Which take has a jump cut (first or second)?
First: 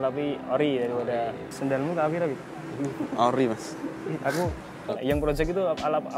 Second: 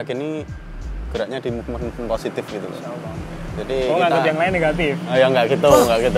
first